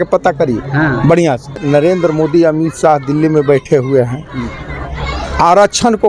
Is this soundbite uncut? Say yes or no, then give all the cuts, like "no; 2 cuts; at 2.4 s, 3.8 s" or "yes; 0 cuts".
no; 1 cut; at 1.6 s